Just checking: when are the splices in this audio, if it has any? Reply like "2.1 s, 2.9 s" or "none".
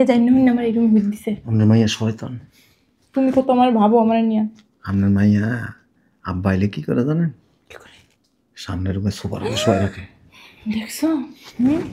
none